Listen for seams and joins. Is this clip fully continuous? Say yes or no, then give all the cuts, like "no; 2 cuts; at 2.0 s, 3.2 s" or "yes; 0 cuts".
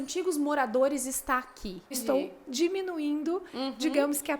no; 1 cut; at 2.0 s